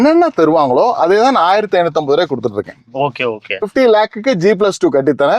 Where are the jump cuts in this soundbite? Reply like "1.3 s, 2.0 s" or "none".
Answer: 3.7 s